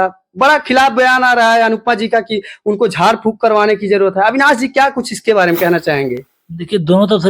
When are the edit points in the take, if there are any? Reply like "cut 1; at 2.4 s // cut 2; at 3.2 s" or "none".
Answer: none